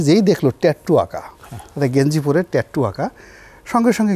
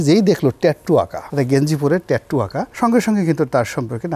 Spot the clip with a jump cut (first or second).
second